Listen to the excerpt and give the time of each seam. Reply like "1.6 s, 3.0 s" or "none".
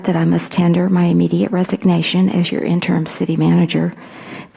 none